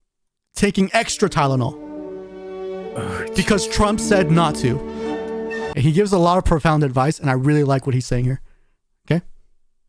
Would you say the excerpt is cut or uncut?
cut